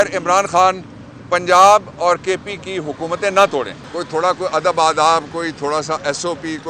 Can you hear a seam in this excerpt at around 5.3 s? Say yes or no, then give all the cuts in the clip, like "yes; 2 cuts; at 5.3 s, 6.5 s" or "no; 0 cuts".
no; 1 cut; at 3.8 s